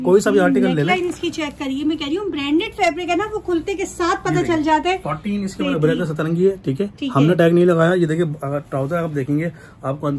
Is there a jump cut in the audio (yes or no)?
no